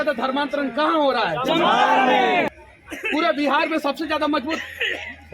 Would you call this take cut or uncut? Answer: cut